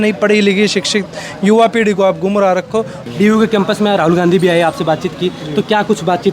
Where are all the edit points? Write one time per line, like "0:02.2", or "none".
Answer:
0:03.0